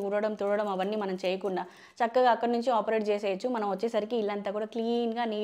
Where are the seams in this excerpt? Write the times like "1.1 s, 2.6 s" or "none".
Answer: none